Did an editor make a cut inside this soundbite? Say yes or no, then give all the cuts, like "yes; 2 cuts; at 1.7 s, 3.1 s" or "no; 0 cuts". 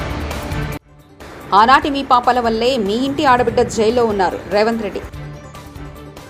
no; 0 cuts